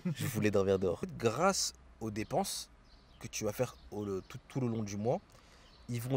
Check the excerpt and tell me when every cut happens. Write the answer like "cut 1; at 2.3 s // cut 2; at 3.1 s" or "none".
cut 1; at 1.1 s